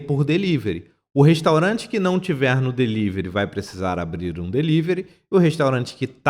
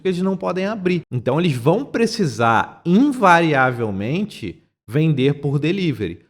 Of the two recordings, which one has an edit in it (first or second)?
second